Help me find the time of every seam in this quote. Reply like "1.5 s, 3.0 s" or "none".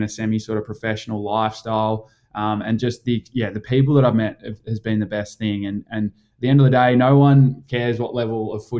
none